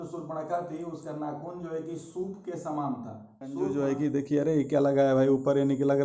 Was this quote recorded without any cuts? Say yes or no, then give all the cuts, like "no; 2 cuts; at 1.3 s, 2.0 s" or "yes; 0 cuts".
no; 1 cut; at 3.6 s